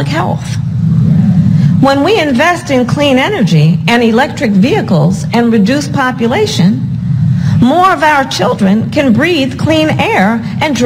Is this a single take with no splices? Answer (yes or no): yes